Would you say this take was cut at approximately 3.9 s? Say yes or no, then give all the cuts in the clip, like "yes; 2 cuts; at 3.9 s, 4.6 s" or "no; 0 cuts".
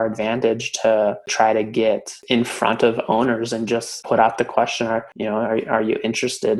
yes; 4 cuts; at 1.2 s, 2.1 s, 3.9 s, 5.1 s